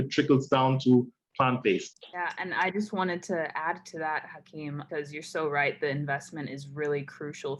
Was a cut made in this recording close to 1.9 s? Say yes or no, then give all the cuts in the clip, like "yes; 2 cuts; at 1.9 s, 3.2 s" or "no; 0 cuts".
no; 0 cuts